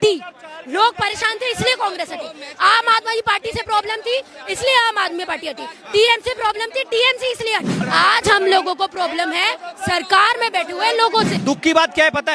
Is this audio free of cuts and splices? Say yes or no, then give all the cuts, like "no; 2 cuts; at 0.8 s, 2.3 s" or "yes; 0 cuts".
no; 2 cuts; at 7.8 s, 11.3 s